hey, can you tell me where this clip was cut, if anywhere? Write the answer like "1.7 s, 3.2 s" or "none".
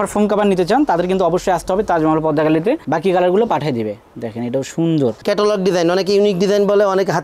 2.8 s, 5.2 s